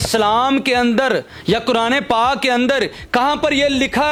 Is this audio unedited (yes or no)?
yes